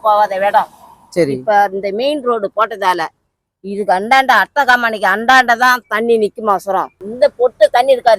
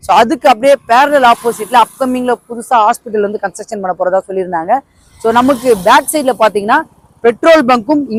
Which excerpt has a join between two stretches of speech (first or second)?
first